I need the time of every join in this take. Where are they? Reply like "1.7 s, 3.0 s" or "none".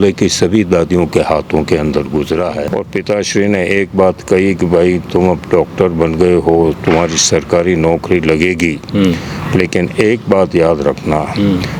2.6 s